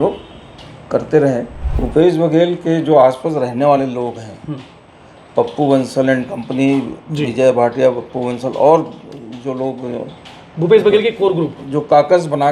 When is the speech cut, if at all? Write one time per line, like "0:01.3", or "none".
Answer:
0:01.6